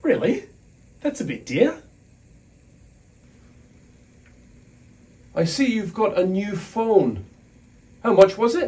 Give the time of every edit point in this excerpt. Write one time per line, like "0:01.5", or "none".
0:03.2

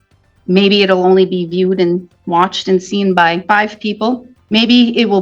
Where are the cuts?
0:03.4
0:04.3

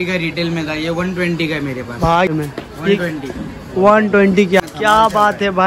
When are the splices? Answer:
0:02.3
0:04.6

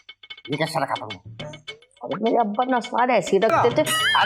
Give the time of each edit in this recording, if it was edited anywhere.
none

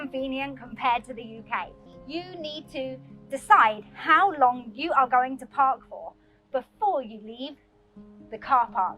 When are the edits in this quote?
0:01.8

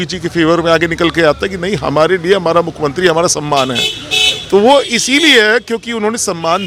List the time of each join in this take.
none

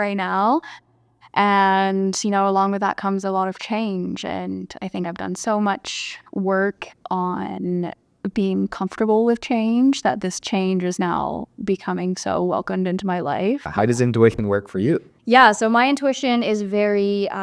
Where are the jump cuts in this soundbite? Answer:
0:13.7
0:15.1

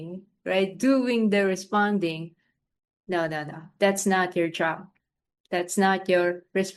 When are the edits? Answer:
none

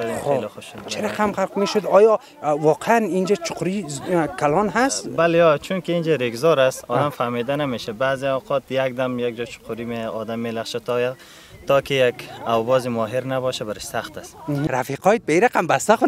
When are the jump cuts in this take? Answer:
0:14.6

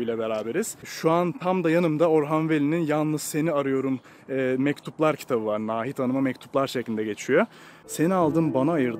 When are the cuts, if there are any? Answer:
0:00.9
0:07.7

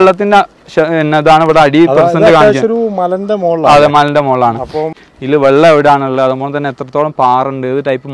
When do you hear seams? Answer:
0:04.9

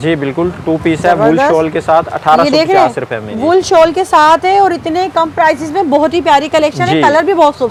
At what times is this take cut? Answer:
none

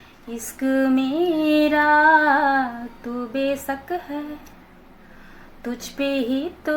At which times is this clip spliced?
none

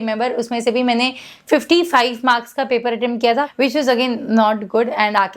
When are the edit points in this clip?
0:03.5

